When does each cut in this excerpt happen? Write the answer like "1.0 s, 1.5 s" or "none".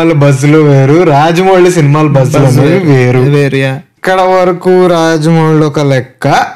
3.9 s